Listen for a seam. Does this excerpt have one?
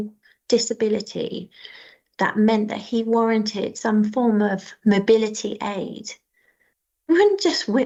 no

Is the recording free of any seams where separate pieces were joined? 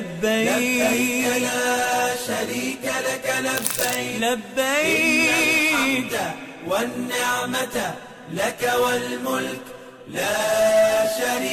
yes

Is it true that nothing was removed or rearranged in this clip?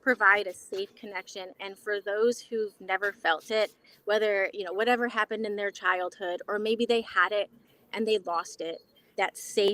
yes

